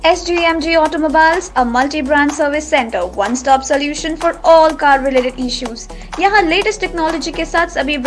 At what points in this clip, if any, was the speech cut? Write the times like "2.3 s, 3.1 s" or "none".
none